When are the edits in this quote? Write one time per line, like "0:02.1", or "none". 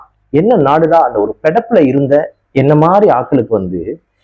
none

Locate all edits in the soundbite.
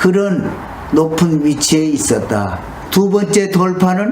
0:02.8

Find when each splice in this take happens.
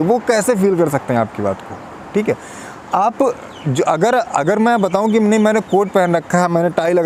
none

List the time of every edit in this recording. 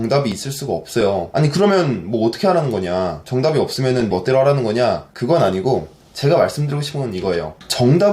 0:01.3

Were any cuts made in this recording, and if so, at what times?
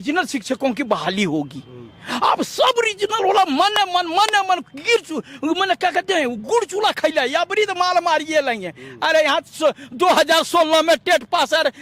none

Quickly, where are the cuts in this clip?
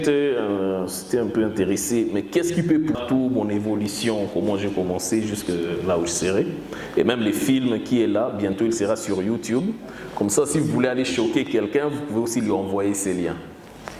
0:03.0

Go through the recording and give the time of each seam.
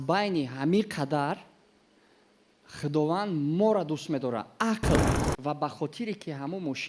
0:05.2

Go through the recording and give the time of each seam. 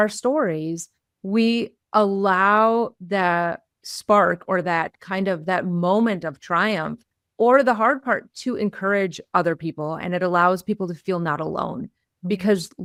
none

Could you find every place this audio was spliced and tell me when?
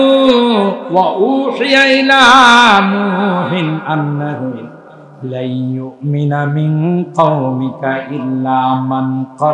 none

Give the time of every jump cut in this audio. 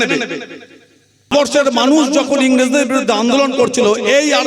0:01.3

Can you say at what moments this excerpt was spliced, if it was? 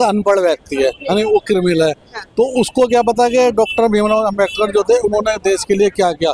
none

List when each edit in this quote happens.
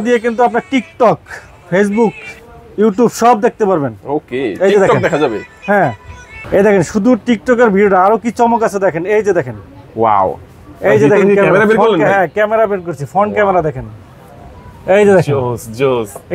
none

